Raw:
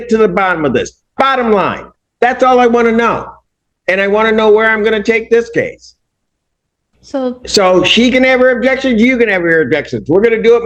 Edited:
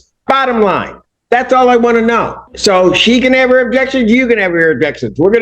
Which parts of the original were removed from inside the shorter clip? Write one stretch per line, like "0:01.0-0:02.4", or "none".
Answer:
0:03.4-0:07.4